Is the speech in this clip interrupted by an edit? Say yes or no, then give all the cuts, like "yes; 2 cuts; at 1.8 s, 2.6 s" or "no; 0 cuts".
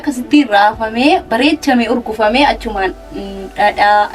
no; 0 cuts